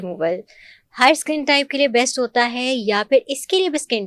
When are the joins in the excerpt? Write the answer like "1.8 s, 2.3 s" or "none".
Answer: none